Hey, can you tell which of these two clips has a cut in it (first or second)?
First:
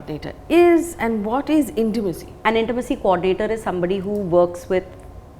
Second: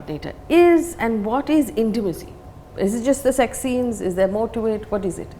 first